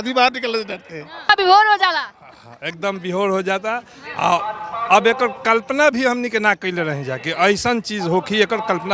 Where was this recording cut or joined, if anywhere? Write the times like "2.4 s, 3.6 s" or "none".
1.3 s